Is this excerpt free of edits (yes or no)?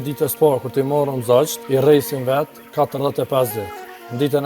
no